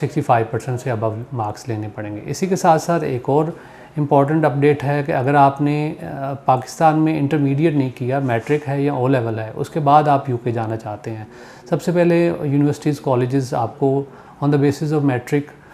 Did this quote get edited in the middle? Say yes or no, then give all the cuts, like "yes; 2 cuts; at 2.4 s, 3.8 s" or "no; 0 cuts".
no; 0 cuts